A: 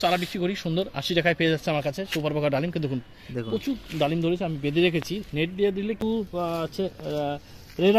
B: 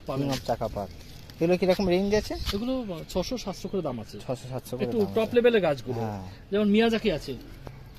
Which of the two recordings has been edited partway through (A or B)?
A